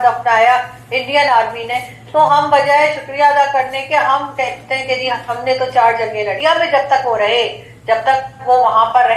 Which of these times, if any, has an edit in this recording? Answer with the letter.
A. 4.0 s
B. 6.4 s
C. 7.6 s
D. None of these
B